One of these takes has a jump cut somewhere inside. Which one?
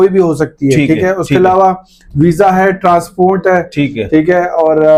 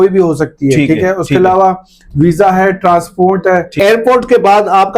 second; 1 cut; at 3.7 s

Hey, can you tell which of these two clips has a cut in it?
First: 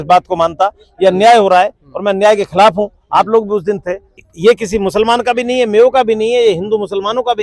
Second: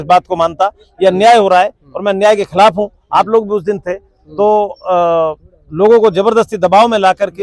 first; 1 cut; at 4.3 s

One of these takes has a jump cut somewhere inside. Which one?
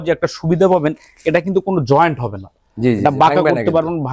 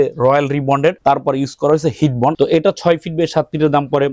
second; 2 cuts; at 1.0 s, 2.4 s

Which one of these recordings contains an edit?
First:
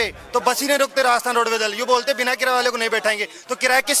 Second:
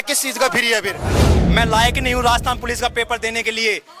second; 1 cut; at 1.3 s

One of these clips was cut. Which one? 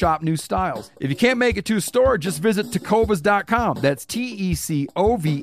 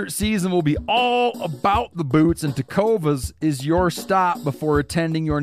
first; 1 cut; at 0.9 s

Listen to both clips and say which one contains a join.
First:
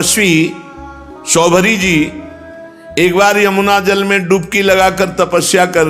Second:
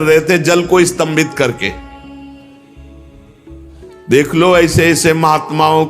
second; 2 cuts; at 2.2 s, 4.1 s

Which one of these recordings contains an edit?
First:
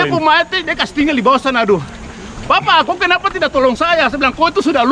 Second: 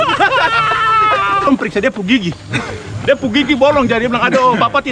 second; 1 cut; at 1.5 s

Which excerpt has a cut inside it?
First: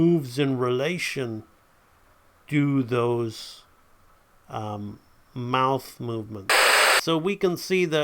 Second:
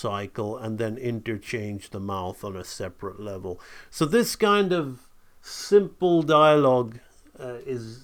first; 1 cut; at 6.8 s

